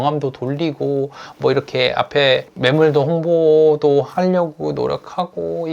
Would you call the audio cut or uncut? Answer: uncut